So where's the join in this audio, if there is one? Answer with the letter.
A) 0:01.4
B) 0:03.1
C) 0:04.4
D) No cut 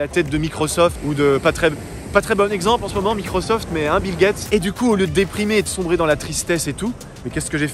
C